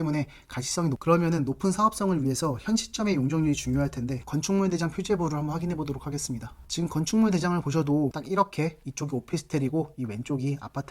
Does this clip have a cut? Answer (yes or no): yes